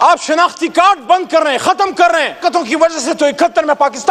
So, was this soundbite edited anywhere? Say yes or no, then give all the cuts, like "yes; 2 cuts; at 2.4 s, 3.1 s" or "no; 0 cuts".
yes; 1 cut; at 2.4 s